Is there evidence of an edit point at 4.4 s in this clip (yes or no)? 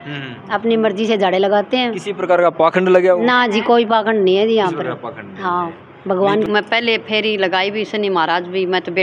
no